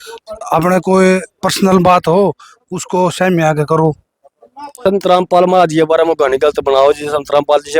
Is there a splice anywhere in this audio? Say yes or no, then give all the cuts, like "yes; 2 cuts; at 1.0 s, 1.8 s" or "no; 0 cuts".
yes; 1 cut; at 4.9 s